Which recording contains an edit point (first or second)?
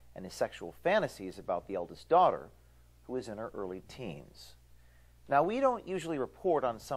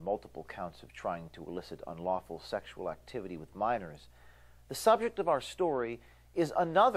second